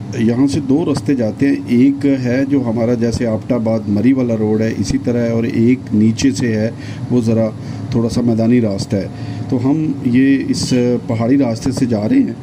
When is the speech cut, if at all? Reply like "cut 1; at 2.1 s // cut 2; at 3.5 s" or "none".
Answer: none